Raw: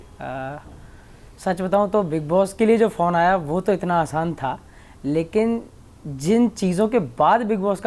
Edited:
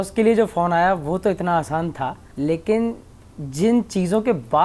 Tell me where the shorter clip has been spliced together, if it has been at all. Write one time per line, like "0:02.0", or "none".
0:02.2